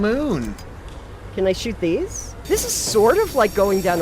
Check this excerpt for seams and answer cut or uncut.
cut